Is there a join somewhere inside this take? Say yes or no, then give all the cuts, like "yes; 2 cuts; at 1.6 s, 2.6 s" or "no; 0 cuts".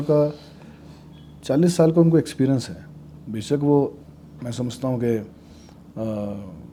no; 0 cuts